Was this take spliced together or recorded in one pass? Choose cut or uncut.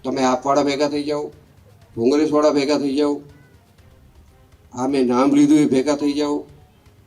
uncut